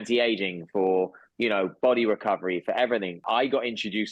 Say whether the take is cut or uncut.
cut